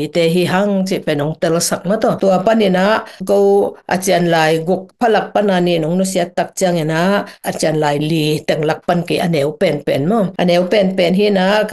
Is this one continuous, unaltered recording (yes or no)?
yes